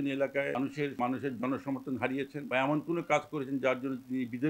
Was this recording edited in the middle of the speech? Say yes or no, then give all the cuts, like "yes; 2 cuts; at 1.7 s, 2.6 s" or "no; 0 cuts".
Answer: yes; 2 cuts; at 1.0 s, 2.4 s